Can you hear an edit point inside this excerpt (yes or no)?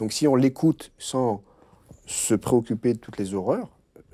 no